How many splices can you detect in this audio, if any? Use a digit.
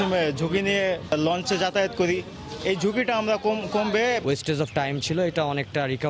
2